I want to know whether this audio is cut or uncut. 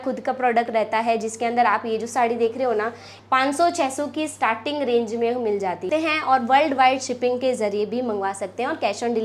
cut